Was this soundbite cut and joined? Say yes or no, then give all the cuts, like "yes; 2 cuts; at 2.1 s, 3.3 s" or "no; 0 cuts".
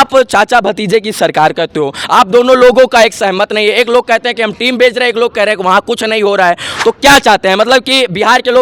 no; 0 cuts